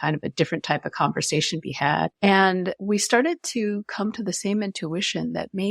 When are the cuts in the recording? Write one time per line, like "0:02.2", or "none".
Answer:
0:02.1
0:02.8

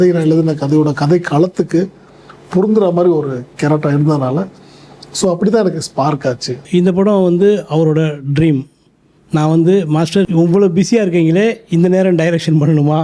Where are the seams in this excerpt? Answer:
0:06.6
0:10.3

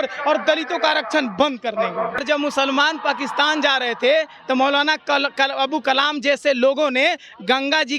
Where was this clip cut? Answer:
0:02.2

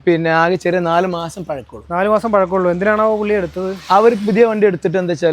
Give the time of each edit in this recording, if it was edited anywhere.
none

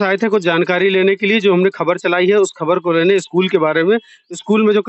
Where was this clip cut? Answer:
none

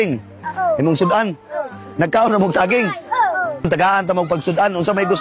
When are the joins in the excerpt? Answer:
0:03.7

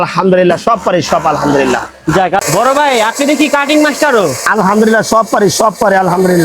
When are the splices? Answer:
0:02.4

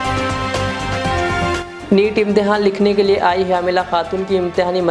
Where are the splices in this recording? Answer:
0:01.7

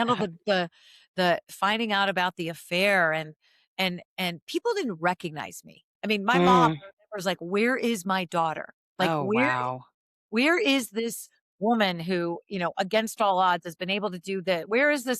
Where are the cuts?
none

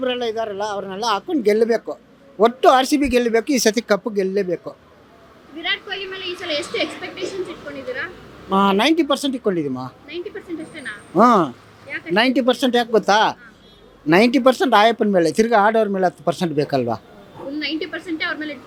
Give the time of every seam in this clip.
none

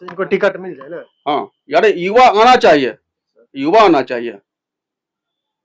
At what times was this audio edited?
none

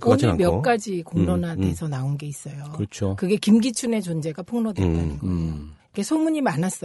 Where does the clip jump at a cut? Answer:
0:03.6

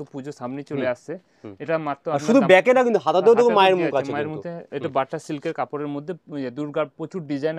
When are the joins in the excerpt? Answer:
none

